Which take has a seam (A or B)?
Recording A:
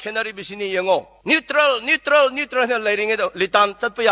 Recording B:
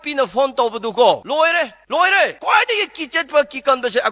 B